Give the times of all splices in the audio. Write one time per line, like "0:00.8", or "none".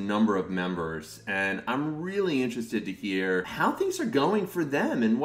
none